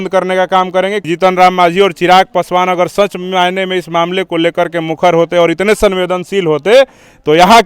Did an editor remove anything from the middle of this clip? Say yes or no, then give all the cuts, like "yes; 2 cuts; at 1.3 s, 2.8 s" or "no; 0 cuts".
yes; 1 cut; at 1.0 s